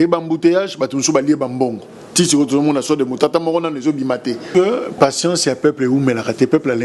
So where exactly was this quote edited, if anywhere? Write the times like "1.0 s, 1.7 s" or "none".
4.4 s